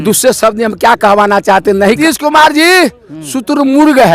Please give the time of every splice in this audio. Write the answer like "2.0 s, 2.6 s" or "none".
2.0 s